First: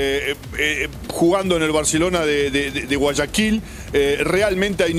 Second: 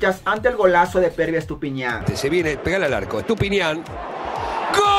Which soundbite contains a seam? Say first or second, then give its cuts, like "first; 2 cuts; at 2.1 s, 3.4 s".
second; 1 cut; at 2.0 s